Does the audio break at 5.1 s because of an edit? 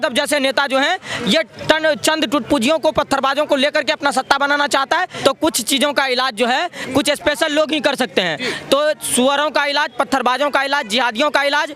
yes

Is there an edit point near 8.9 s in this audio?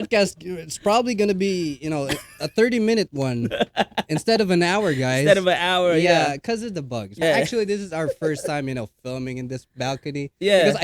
no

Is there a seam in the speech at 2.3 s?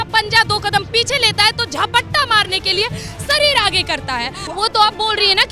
no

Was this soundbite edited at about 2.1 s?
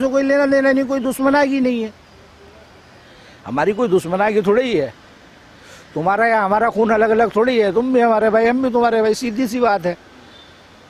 no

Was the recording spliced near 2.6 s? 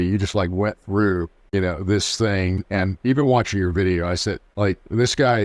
yes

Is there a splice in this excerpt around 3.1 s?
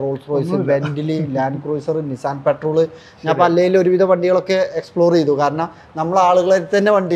no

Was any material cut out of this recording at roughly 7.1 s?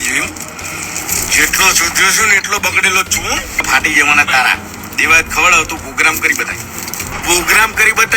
yes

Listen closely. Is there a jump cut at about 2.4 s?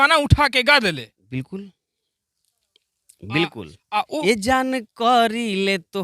no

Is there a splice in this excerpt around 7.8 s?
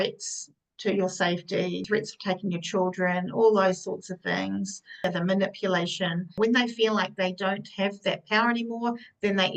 no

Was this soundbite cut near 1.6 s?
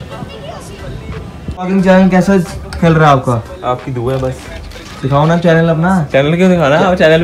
yes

